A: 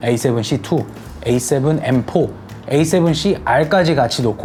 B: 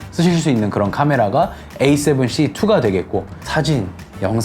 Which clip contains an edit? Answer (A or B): B